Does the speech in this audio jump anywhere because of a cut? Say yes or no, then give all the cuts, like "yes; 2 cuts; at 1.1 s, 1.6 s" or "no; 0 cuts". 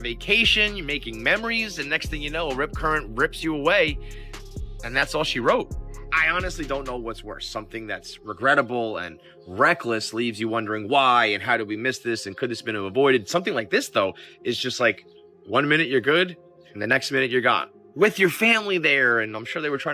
no; 0 cuts